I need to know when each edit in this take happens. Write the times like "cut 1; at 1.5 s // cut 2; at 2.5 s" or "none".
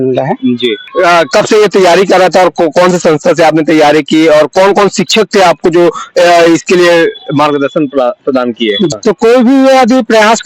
cut 1; at 0.8 s // cut 2; at 8.9 s